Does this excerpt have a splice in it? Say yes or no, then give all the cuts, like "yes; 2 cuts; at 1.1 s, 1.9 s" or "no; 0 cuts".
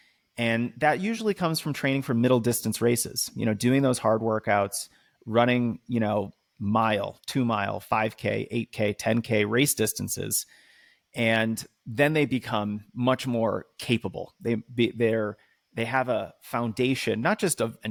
no; 0 cuts